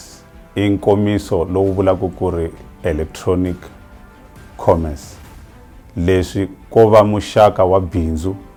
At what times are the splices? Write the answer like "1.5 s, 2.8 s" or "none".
none